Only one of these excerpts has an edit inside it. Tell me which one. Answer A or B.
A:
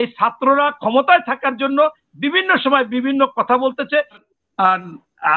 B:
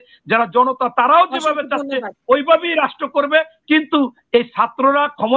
A